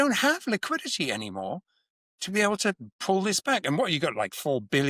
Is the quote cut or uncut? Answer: uncut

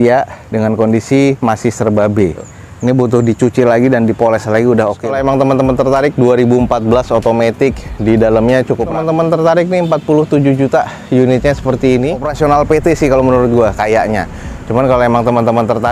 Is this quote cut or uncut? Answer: cut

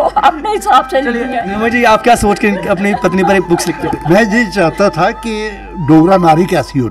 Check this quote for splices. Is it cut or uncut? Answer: uncut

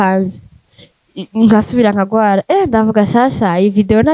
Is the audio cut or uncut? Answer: uncut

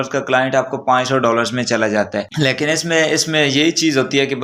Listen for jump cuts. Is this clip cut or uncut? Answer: uncut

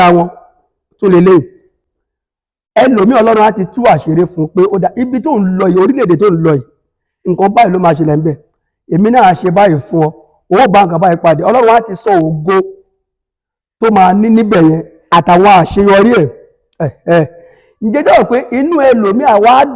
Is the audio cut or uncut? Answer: uncut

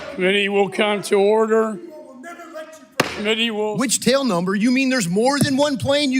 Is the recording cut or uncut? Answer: cut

